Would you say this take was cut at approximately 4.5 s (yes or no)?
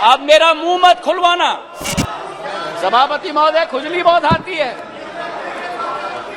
no